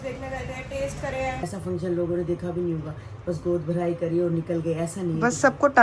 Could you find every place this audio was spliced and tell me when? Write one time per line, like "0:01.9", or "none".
0:01.4